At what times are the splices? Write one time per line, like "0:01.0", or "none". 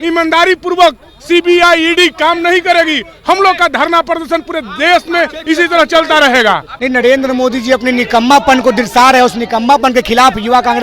0:06.7